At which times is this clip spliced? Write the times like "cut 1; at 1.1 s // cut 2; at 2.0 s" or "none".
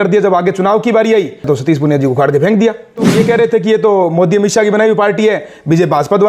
cut 1; at 1.4 s // cut 2; at 3.1 s